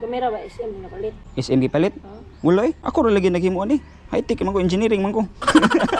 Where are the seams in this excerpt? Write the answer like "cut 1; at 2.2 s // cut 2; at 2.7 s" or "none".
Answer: cut 1; at 1.2 s // cut 2; at 2.8 s